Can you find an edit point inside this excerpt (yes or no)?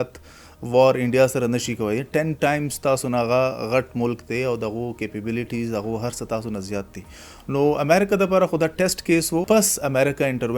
yes